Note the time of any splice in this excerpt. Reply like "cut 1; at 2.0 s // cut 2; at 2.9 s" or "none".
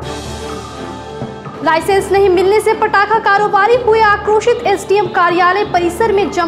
cut 1; at 1.5 s